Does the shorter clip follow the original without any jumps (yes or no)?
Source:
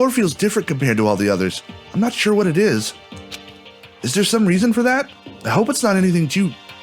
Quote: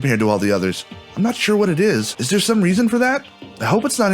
no